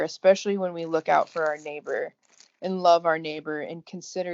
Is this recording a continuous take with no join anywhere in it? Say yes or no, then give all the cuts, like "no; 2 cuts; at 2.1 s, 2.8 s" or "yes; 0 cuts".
yes; 0 cuts